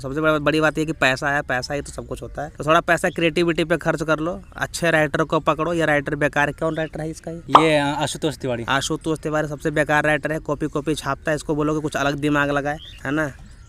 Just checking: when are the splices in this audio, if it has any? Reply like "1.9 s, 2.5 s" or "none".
none